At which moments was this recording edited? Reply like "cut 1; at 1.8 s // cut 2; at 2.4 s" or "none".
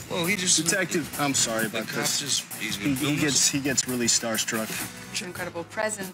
cut 1; at 5.1 s